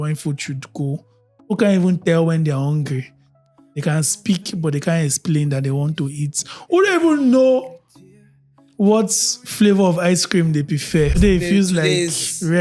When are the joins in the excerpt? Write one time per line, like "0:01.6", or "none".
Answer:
0:11.2